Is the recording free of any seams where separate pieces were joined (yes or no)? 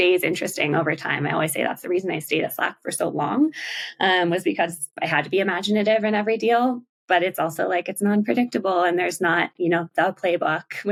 yes